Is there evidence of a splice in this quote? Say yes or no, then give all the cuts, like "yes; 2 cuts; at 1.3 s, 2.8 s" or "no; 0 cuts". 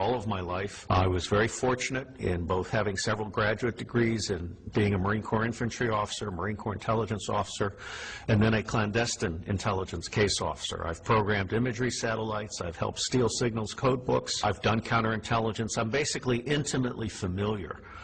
yes; 1 cut; at 17.0 s